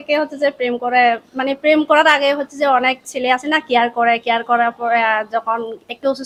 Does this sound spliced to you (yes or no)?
no